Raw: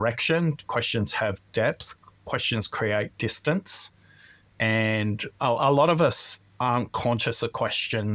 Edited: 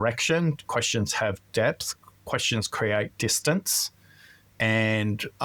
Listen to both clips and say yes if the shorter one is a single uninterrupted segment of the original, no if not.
yes